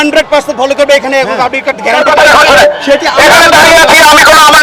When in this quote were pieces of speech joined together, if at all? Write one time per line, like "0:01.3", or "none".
0:02.0